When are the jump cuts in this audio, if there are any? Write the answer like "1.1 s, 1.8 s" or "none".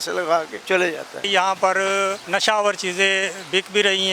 1.1 s, 2.2 s

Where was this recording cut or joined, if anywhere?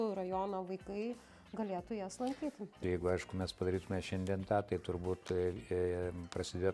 2.8 s

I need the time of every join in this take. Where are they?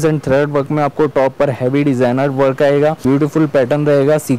3.0 s

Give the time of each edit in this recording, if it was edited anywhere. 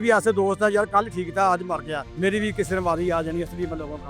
2.0 s

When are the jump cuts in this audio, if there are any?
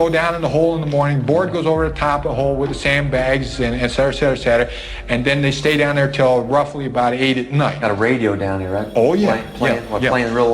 7.8 s

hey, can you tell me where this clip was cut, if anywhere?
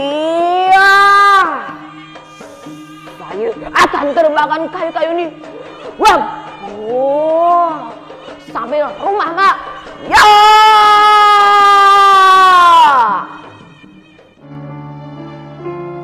14.5 s

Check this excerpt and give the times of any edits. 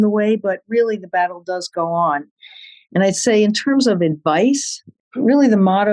5.0 s

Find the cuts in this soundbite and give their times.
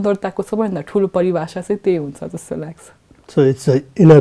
none

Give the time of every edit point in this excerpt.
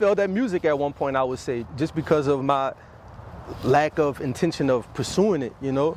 none

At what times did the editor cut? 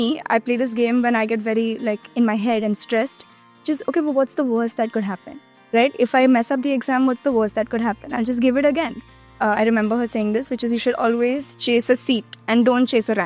9.2 s

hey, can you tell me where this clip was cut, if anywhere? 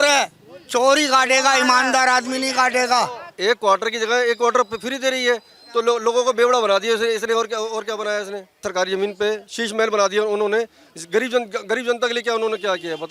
3.2 s, 8.6 s

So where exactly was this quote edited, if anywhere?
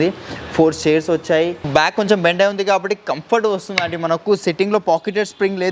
1.6 s

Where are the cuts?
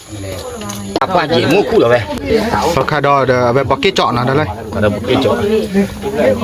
1.0 s

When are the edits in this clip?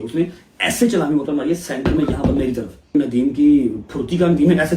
2.9 s

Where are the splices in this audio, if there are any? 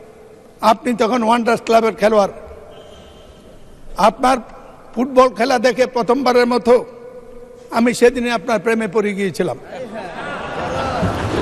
none

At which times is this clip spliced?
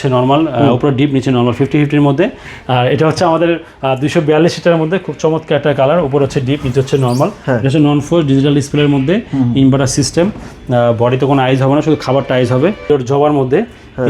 2.4 s, 7.4 s, 12.8 s

